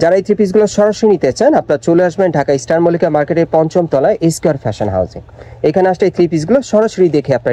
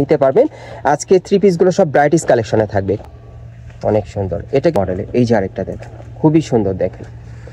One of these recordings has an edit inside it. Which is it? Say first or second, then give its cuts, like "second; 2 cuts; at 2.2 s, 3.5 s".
second; 2 cuts; at 3.0 s, 4.8 s